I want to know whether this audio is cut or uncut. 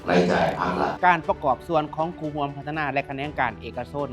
cut